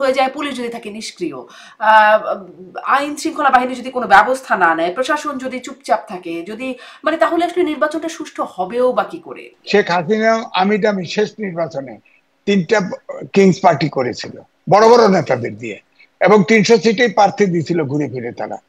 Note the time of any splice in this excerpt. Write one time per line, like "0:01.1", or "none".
0:09.5